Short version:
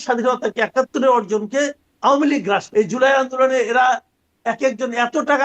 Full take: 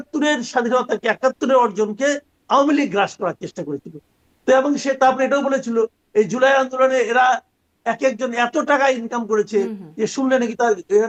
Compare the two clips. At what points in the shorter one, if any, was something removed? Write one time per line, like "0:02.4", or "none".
0:02.7